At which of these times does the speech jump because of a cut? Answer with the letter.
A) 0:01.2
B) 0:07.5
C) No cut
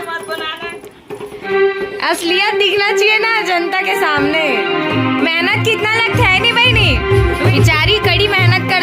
B